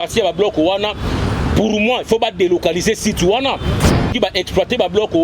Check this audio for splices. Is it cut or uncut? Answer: cut